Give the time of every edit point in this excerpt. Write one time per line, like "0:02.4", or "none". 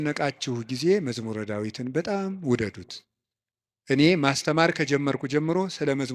none